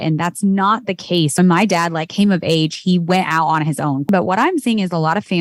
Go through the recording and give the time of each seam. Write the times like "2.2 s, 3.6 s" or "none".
1.3 s, 4.1 s